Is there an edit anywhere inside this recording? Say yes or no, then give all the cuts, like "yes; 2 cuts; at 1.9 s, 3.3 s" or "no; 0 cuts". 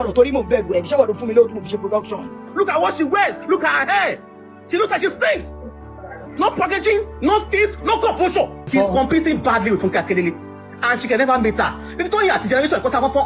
yes; 2 cuts; at 2.5 s, 8.6 s